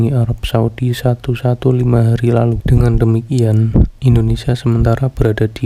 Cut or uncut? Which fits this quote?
cut